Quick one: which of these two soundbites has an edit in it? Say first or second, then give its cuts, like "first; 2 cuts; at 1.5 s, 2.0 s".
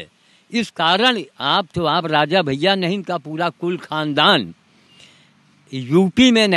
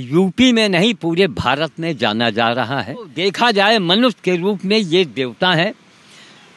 second; 1 cut; at 3.1 s